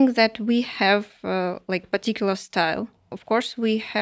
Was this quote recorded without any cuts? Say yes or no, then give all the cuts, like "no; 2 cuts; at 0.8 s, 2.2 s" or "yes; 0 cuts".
no; 1 cut; at 3.1 s